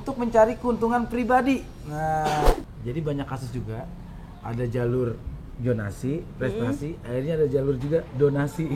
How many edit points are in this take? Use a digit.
1